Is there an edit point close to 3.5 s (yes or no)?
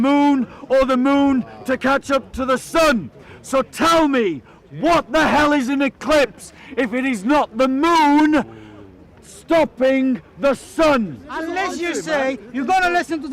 no